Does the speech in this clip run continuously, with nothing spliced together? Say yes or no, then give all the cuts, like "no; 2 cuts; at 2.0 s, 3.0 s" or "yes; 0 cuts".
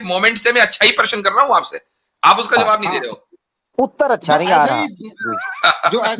yes; 0 cuts